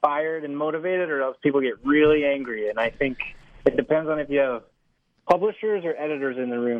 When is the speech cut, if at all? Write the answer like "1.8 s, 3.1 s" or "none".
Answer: none

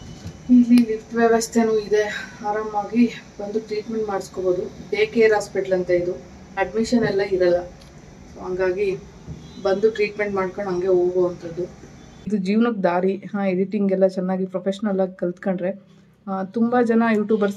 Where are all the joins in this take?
12.3 s

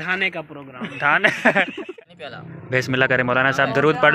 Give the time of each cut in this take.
2.0 s

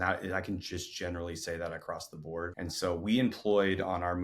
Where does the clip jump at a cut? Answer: 2.5 s

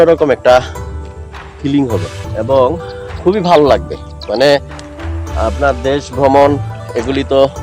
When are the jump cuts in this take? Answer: 2.2 s

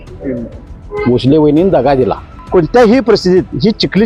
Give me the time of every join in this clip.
2.3 s

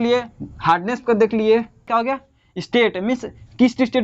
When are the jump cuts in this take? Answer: 1.8 s

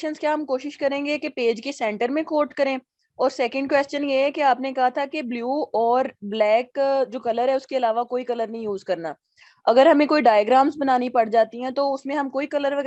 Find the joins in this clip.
none

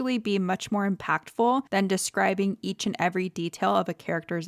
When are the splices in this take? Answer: 1.7 s

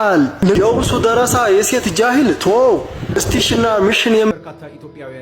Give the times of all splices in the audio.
4.3 s

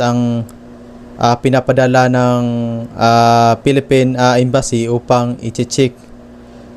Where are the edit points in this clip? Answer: none

